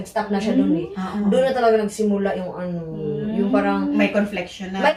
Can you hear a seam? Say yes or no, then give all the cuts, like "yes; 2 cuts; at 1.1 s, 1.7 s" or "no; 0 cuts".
no; 0 cuts